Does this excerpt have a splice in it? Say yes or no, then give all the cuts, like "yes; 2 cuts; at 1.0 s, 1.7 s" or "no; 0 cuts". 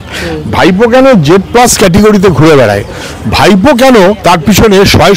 yes; 1 cut; at 4.2 s